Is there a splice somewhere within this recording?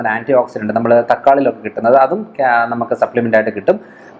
no; 0 cuts

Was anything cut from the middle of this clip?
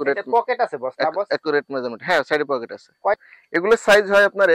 yes; 1 cut; at 3.2 s

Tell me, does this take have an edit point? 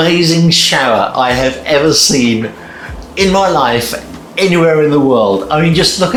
no; 0 cuts

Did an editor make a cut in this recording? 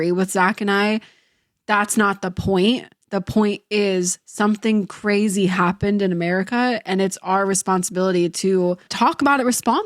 yes; 1 cut; at 8.9 s

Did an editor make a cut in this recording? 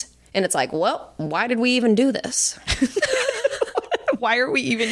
no; 0 cuts

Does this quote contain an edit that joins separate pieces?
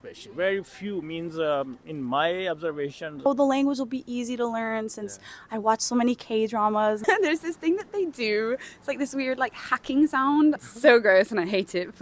yes; 3 cuts; at 3.3 s, 7.0 s, 10.7 s

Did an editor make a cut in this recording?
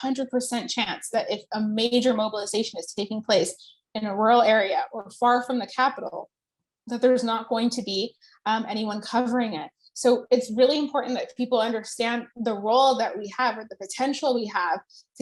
no; 0 cuts

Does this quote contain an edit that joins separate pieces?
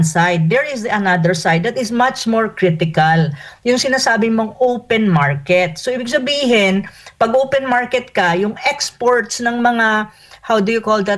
no; 0 cuts

